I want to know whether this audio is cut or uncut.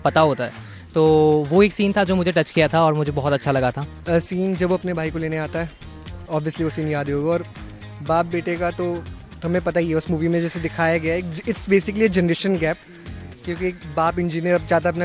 uncut